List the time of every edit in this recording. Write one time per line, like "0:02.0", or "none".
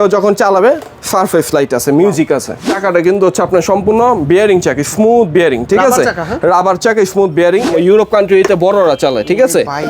0:02.7
0:07.7